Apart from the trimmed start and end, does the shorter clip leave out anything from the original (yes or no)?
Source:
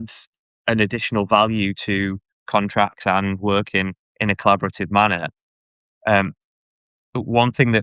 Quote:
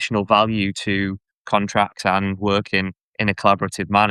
no